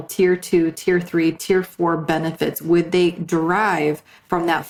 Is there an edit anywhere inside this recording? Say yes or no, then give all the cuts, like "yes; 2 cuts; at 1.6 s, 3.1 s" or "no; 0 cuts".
no; 0 cuts